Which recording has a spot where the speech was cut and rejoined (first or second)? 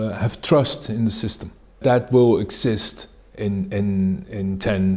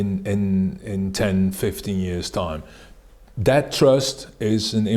first